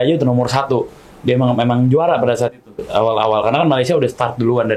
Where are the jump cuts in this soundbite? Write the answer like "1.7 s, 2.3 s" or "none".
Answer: none